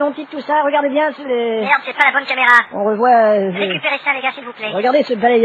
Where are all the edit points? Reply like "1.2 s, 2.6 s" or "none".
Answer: 3.3 s